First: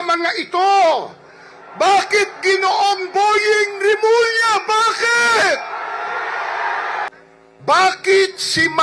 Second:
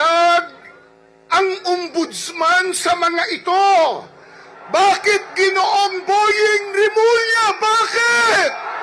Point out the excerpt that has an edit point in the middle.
first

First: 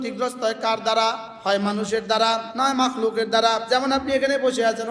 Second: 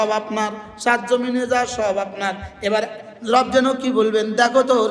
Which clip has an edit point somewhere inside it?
first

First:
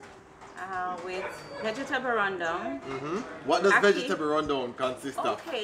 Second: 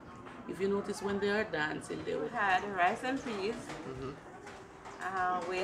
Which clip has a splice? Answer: second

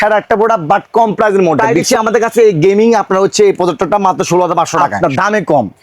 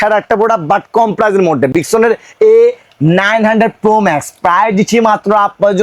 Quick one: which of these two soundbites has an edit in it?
first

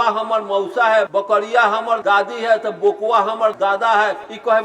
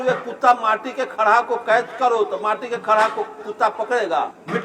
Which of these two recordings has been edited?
first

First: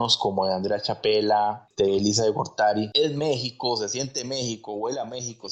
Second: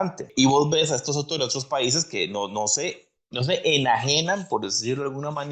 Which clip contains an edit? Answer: first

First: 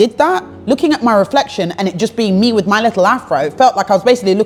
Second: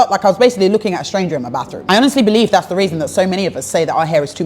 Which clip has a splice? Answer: second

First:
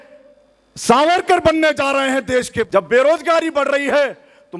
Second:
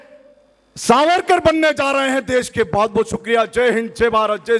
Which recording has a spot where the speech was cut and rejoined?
first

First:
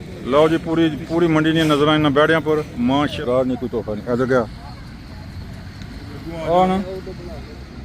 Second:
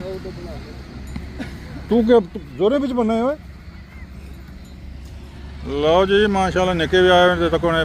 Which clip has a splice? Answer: first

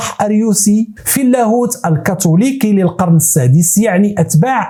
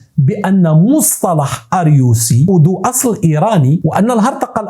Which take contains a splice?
second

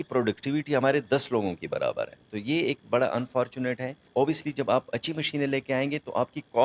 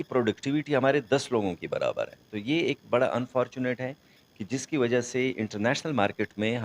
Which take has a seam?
first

